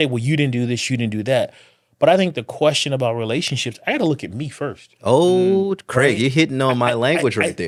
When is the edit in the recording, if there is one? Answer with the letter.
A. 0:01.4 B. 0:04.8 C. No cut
C